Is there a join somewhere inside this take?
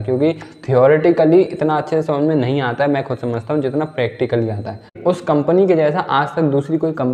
yes; 1 cut; at 5.0 s

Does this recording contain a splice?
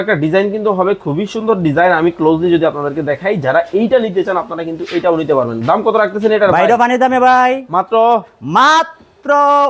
no; 0 cuts

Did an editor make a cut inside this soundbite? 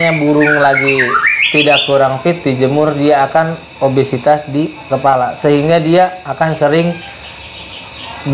no; 0 cuts

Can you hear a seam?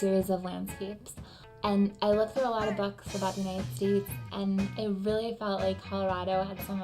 yes; 1 cut; at 4.7 s

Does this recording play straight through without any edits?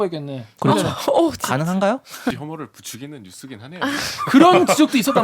no; 1 cut; at 2.3 s

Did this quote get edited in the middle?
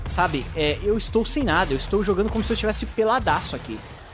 yes; 1 cut; at 1.2 s

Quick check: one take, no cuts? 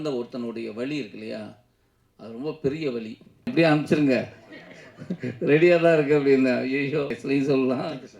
no; 2 cuts; at 3.5 s, 7.2 s

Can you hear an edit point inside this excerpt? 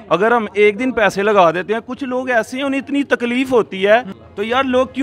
yes; 1 cut; at 3.7 s

